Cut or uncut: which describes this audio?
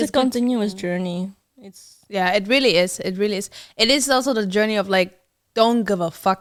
uncut